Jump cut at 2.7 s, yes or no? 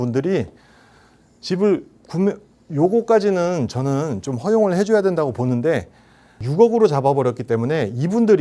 no